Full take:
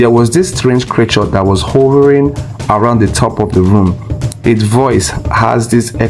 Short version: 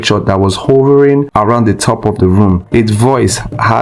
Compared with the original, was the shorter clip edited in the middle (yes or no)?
yes